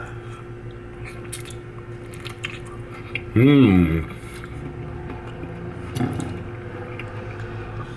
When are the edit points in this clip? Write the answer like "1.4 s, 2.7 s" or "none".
none